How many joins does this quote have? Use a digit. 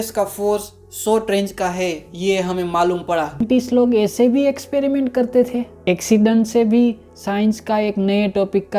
1